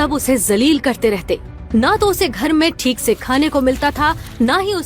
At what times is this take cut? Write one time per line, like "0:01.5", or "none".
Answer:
none